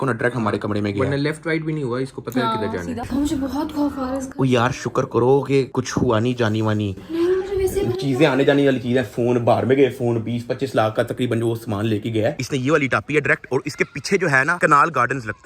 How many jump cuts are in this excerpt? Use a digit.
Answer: 2